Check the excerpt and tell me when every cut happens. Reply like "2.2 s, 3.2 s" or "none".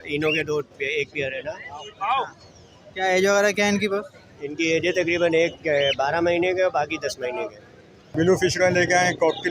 8.1 s